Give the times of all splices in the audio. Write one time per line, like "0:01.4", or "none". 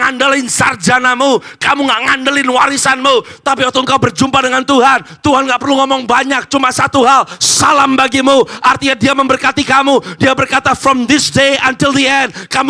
none